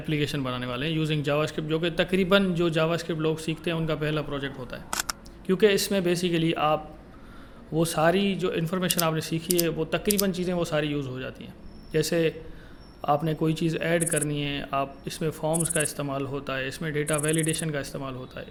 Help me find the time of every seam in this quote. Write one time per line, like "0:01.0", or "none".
none